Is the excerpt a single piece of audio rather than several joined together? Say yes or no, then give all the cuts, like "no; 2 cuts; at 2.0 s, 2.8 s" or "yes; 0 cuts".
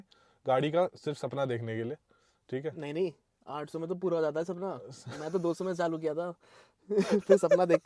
yes; 0 cuts